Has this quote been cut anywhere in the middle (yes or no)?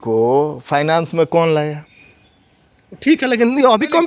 no